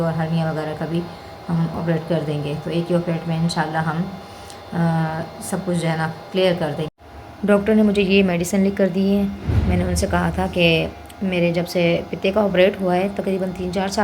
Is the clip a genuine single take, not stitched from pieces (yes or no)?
no